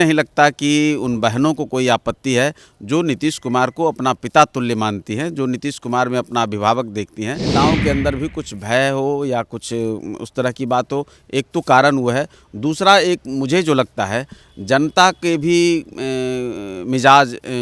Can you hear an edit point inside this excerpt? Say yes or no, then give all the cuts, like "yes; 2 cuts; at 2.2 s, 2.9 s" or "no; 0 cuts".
yes; 1 cut; at 7.5 s